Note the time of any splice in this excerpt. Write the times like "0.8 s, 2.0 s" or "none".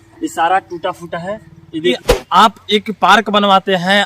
2.0 s

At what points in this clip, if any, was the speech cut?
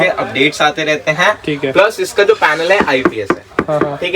none

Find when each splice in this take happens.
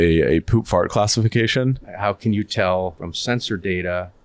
1.9 s, 3.1 s

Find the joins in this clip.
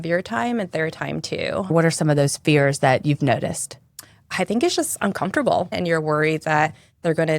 1.7 s, 5.8 s

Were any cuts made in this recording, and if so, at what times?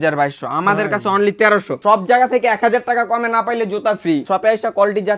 1.8 s, 4.2 s

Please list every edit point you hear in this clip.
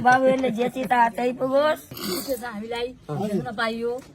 2.0 s

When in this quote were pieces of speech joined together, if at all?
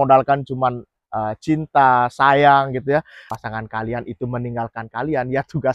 3.2 s

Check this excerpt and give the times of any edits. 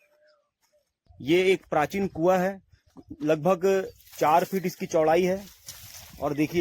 1.1 s

